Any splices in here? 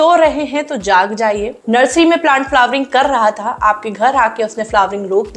no; 0 cuts

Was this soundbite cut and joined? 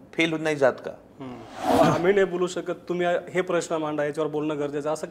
yes; 1 cut; at 1.7 s

